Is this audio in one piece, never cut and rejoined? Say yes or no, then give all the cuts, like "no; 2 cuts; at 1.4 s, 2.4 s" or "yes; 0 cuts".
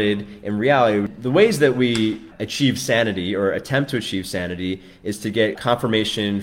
no; 3 cuts; at 1.1 s, 2.4 s, 5.6 s